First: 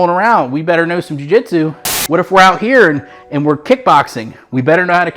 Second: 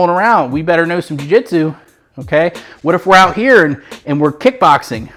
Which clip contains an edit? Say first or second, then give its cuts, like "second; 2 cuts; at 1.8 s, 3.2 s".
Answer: first; 1 cut; at 1.9 s